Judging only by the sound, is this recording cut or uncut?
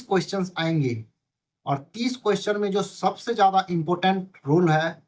uncut